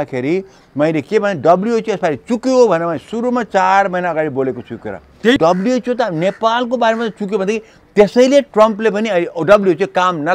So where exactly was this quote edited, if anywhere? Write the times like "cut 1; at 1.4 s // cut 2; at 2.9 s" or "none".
cut 1; at 5.4 s